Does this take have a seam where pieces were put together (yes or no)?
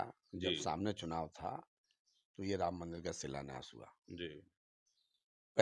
no